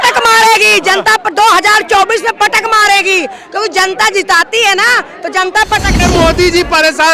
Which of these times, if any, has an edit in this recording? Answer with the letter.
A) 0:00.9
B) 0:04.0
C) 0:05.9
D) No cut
C